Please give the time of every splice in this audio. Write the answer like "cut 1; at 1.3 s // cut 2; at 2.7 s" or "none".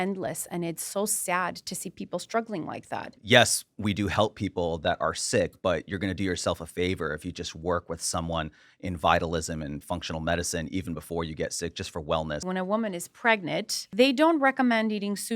cut 1; at 3.1 s // cut 2; at 12.4 s // cut 3; at 13.9 s